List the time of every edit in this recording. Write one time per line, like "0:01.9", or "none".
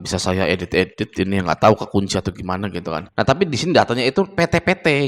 0:03.0

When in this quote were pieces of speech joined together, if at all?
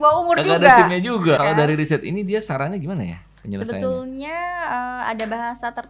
0:01.4

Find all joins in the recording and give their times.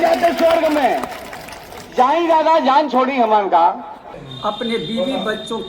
0:04.2

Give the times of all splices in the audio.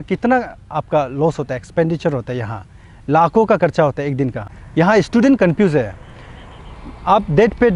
0:04.5

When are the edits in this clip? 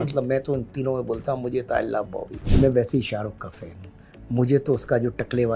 0:02.4

